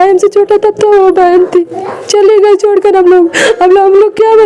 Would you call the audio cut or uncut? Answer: uncut